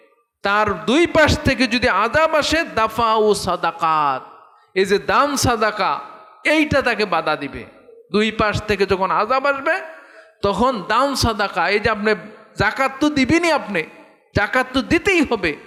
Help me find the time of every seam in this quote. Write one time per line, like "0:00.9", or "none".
none